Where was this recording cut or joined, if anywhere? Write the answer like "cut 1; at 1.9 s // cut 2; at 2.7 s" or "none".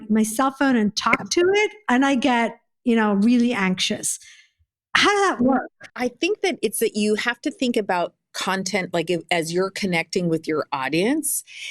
cut 1; at 5.9 s